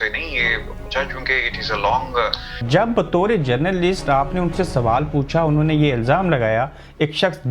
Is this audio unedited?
no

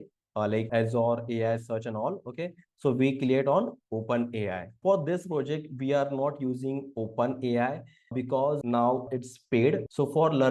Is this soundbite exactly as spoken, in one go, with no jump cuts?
no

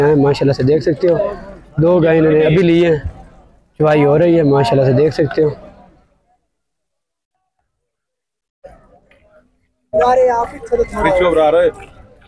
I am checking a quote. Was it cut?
no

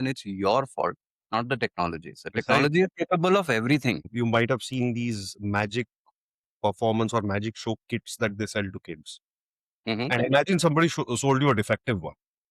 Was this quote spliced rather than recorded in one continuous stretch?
yes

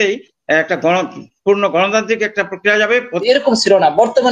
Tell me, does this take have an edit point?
yes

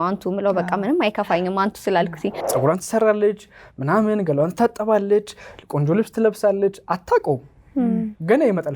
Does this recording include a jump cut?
yes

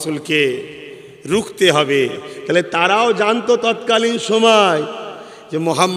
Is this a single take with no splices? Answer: yes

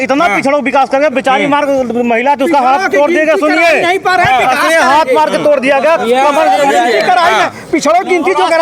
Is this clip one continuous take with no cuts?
yes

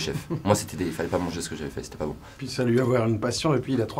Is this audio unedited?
no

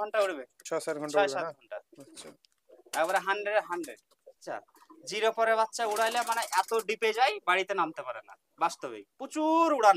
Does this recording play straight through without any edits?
no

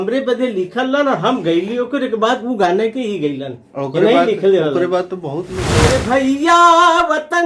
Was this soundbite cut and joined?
yes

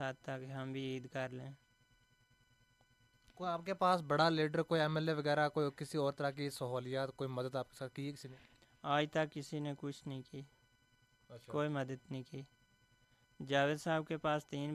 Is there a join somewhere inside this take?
no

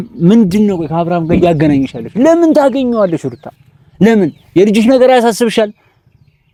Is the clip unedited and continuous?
yes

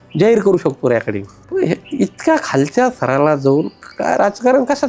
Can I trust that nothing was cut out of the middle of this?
no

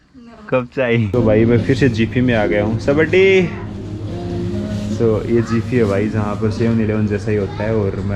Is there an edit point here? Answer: yes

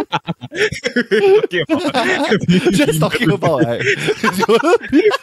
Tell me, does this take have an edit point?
no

